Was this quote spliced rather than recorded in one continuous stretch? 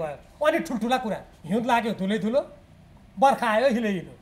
yes; 1 cut; at 1.3 s

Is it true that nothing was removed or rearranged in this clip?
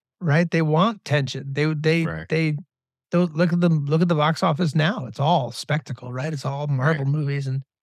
yes; 0 cuts

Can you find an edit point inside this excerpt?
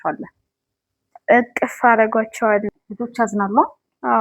yes; 1 cut; at 2.7 s

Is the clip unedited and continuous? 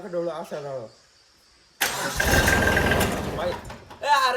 yes; 0 cuts

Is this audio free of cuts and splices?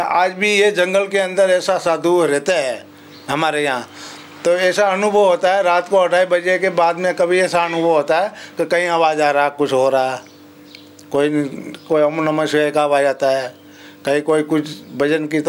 yes; 0 cuts

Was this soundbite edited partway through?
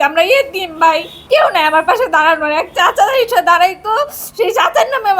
yes; 1 cut; at 1.1 s

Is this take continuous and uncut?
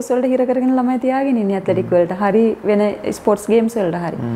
yes; 0 cuts

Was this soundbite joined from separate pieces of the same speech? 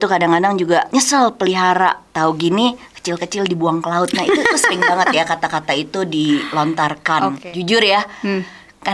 yes; 3 cuts; at 0.9 s, 2.1 s, 7.4 s

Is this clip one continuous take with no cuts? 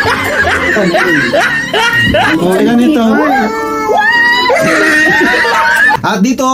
yes; 0 cuts

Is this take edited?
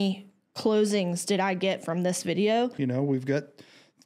yes; 1 cut; at 2.7 s

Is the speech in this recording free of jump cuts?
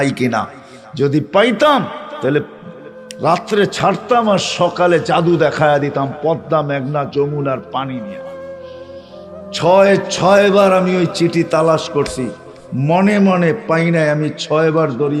yes; 0 cuts

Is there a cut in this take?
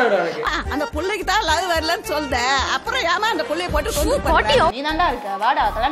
yes; 1 cut; at 4.8 s

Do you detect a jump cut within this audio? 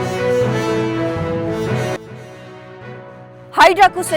yes; 1 cut; at 3.2 s

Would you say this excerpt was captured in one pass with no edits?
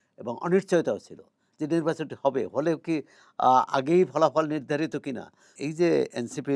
no; 1 cut; at 5.6 s

